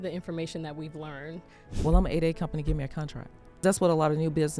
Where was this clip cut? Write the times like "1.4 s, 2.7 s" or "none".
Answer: 1.7 s, 3.6 s